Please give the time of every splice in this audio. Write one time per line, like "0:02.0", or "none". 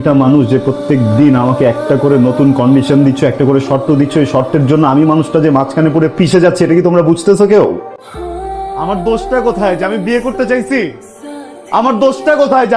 none

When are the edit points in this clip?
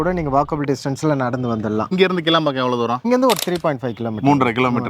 0:01.9

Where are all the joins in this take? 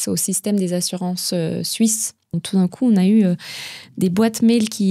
0:02.4

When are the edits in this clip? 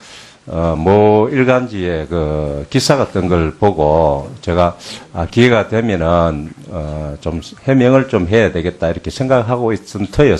0:03.3

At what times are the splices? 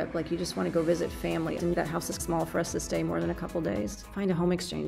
0:01.6
0:04.0

